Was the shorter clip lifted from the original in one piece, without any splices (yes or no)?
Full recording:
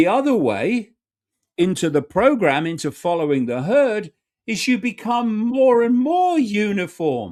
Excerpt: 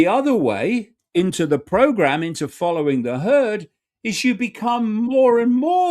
no